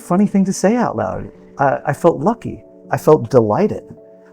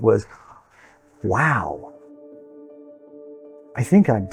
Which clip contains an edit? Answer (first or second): first